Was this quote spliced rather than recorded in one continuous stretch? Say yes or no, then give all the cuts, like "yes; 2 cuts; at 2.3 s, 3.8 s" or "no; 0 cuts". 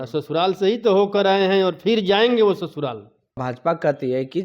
yes; 1 cut; at 3.4 s